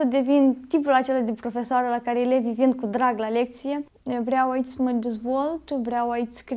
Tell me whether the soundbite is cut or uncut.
cut